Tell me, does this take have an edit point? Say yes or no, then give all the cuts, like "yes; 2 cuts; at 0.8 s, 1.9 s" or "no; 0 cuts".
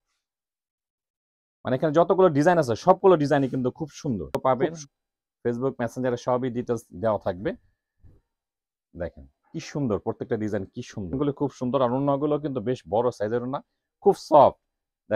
yes; 2 cuts; at 4.3 s, 11.1 s